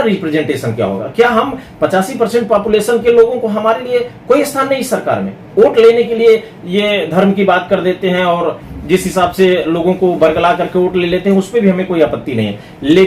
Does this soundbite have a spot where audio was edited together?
no; 0 cuts

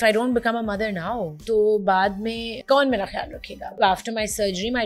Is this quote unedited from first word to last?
no; 3 cuts; at 1.4 s, 2.6 s, 3.7 s

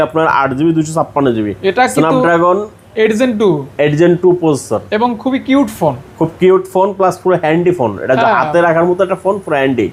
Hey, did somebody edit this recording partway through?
no; 0 cuts

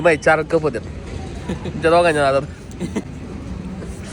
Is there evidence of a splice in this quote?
no; 0 cuts

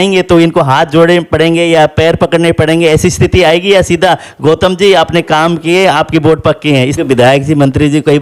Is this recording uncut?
no; 1 cut; at 6.9 s

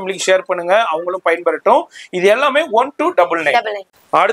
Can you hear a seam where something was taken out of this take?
no; 0 cuts

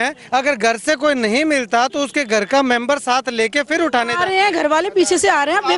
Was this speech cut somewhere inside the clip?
no; 0 cuts

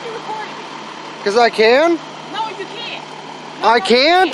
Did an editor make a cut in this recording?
no; 0 cuts

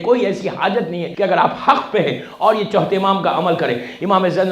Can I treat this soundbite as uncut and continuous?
no; 1 cut; at 1.0 s

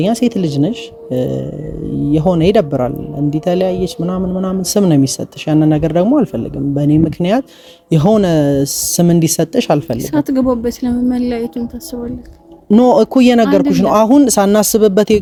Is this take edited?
no; 0 cuts

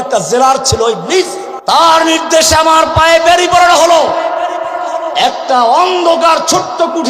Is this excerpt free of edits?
no; 1 cut; at 1.5 s

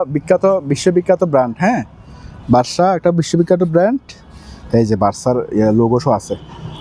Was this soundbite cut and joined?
no; 0 cuts

